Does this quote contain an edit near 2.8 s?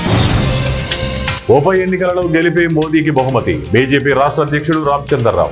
no; 1 cut; at 1.4 s

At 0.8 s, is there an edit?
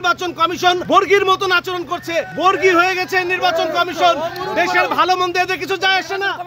yes; 2 cuts; at 0.8 s, 2.3 s

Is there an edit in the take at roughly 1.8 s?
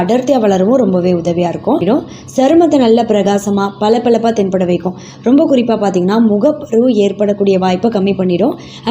yes; 1 cut; at 1.8 s

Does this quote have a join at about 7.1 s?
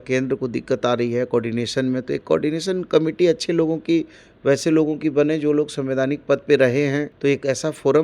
yes; 1 cut; at 7.1 s

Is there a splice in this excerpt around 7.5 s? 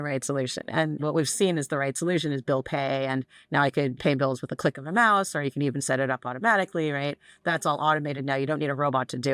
no; 2 cuts; at 1.0 s, 3.9 s

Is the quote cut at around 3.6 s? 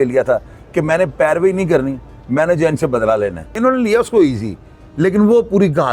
yes; 1 cut; at 3.6 s

